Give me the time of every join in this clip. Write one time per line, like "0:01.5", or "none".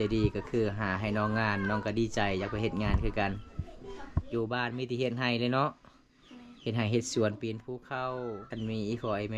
0:08.4